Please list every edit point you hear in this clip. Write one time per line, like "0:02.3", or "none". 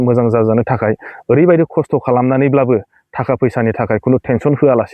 none